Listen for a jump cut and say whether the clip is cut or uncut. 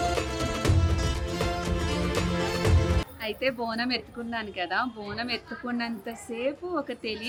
uncut